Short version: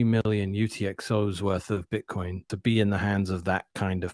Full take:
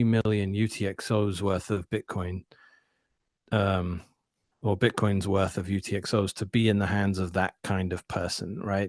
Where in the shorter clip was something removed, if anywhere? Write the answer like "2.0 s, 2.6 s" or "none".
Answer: 2.5 s